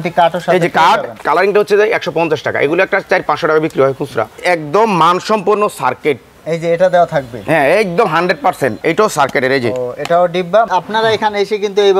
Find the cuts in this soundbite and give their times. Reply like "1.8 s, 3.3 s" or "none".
1.2 s, 4.4 s, 8.8 s, 10.7 s